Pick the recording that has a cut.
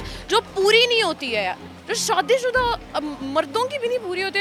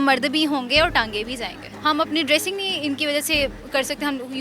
second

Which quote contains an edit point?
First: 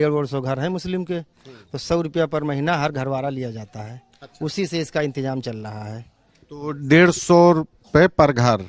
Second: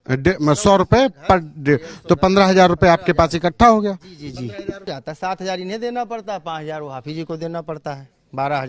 second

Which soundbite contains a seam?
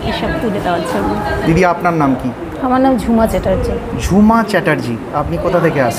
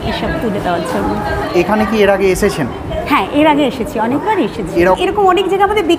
first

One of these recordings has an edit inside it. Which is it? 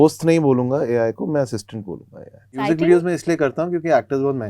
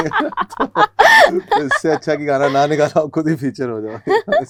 first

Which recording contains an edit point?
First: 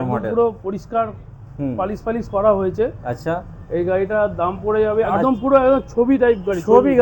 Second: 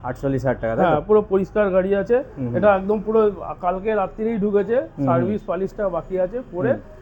first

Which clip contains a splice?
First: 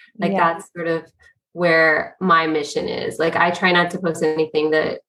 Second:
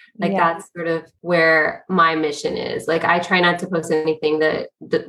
second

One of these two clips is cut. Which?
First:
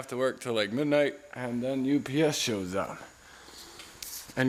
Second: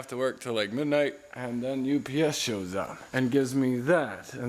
second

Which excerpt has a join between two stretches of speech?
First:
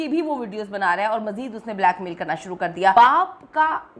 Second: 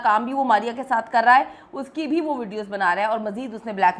first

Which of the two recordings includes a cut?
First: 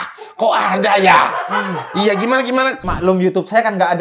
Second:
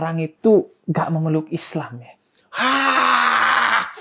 first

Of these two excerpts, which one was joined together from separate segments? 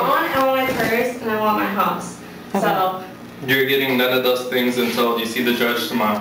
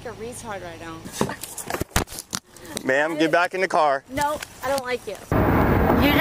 second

